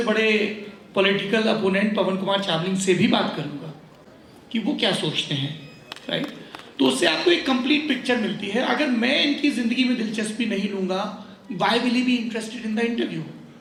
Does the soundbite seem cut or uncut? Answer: uncut